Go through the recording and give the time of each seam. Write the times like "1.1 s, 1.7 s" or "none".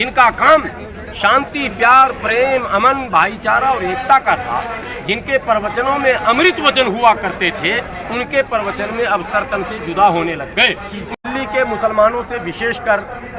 11.1 s